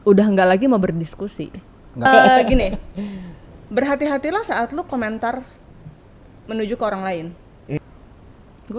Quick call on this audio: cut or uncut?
cut